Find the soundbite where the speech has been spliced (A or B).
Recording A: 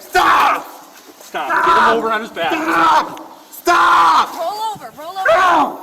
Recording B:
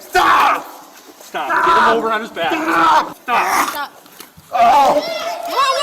B